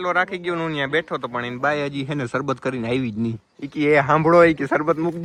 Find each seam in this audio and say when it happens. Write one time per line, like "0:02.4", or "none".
none

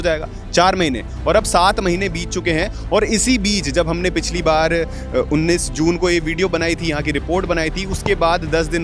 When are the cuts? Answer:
none

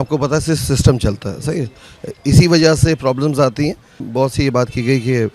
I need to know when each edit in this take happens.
0:04.0

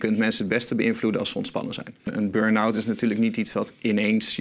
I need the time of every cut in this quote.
0:02.1

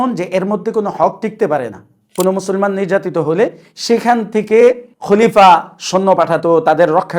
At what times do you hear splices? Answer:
0:02.2

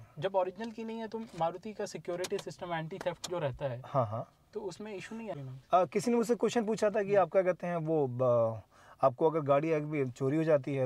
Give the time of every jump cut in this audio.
0:05.2

